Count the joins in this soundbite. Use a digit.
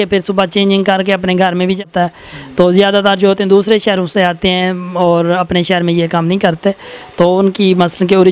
1